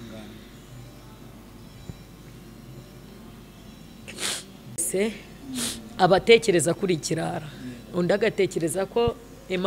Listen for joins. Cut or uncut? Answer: uncut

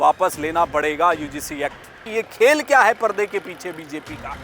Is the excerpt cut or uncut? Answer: cut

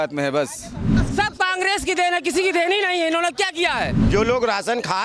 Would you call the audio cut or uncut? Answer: cut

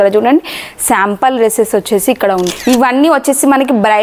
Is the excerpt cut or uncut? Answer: cut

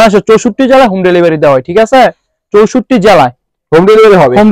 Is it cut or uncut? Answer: uncut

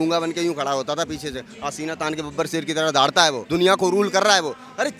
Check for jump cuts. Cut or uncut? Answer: cut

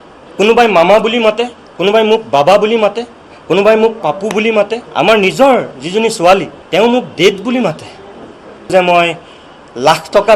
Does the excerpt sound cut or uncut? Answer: cut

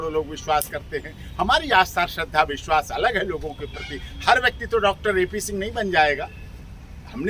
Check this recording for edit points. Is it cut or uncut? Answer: uncut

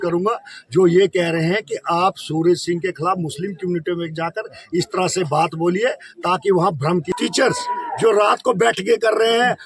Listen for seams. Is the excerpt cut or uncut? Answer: cut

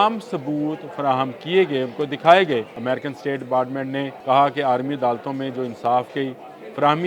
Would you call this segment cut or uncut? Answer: cut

